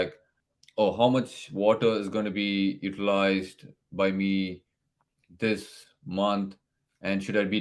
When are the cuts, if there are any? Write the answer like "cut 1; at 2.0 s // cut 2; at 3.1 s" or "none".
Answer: none